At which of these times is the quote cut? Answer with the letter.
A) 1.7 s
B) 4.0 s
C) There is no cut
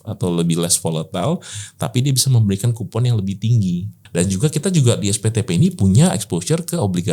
B